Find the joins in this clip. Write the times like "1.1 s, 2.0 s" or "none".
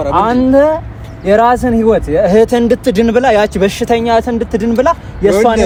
none